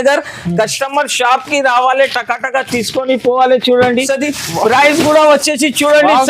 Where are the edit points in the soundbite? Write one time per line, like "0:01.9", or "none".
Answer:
0:04.1